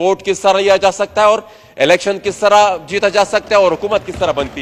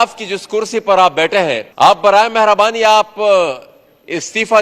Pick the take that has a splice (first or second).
second